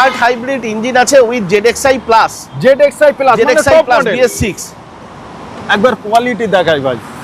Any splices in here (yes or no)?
no